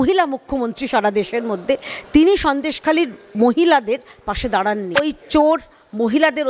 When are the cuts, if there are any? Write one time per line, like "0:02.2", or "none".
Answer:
0:05.1